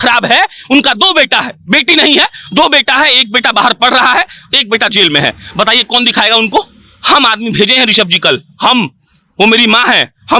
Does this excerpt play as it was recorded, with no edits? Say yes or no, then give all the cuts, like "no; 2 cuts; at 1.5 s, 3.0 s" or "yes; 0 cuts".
yes; 0 cuts